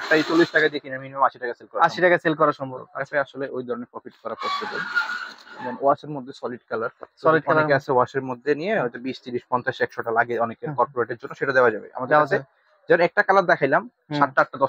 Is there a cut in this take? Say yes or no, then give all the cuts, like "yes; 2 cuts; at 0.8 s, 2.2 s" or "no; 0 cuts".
no; 0 cuts